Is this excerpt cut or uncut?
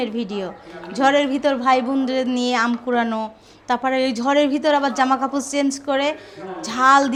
uncut